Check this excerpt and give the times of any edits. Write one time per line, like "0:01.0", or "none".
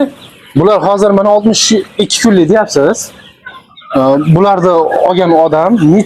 none